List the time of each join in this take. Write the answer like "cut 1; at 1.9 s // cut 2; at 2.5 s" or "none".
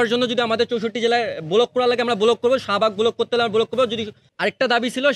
cut 1; at 4.2 s